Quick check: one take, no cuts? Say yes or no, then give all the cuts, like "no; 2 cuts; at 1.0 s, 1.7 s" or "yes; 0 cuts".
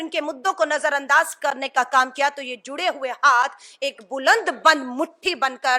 yes; 0 cuts